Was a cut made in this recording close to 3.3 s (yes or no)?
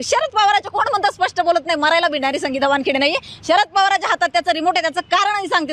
no